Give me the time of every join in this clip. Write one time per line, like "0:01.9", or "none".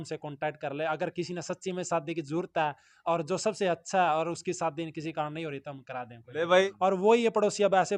0:06.6